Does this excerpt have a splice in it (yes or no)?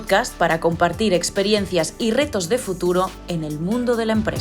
no